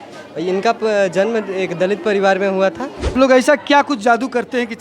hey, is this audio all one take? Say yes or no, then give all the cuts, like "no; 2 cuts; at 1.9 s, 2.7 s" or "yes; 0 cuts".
no; 1 cut; at 3.1 s